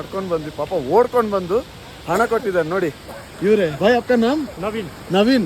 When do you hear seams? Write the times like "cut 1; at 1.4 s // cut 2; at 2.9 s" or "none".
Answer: cut 1; at 3.7 s // cut 2; at 4.5 s